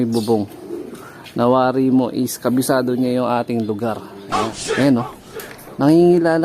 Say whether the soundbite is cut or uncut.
cut